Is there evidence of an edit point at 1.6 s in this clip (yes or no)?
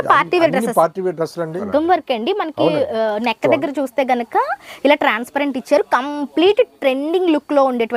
yes